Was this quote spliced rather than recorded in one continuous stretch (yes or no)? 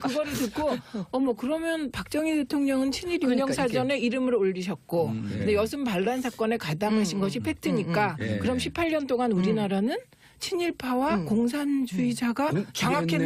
yes